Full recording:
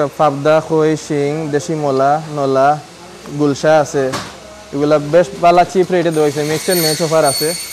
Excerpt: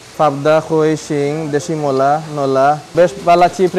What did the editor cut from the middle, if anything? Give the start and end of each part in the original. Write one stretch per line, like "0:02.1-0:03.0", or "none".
0:02.9-0:05.1